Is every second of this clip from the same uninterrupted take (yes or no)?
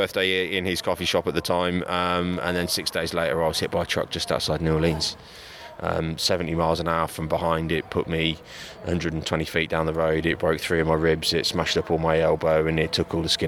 yes